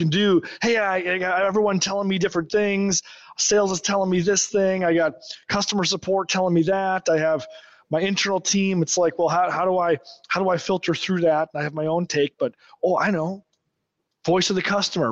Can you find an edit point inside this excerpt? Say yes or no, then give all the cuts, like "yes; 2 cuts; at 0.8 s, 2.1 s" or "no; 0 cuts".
no; 0 cuts